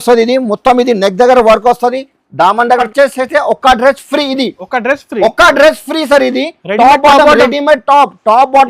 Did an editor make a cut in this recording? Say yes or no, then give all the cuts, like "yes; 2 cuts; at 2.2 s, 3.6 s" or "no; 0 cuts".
yes; 1 cut; at 2.9 s